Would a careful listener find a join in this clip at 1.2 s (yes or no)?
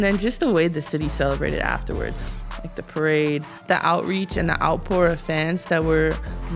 no